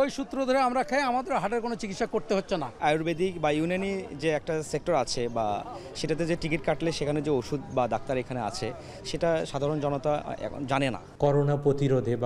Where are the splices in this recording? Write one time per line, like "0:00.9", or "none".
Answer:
0:02.8
0:11.0